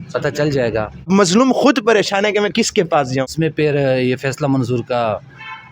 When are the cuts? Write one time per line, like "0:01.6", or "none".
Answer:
0:01.0
0:03.3